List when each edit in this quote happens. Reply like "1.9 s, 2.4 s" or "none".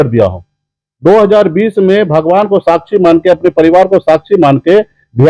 none